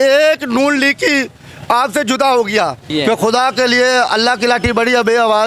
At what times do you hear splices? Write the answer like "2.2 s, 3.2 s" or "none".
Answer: 2.8 s